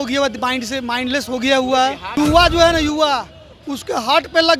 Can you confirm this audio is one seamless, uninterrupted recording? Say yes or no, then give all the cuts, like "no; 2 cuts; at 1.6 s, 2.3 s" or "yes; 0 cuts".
no; 1 cut; at 2.2 s